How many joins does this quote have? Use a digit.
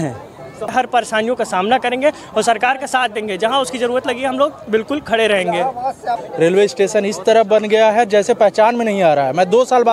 2